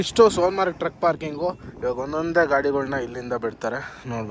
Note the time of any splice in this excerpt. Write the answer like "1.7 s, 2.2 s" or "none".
none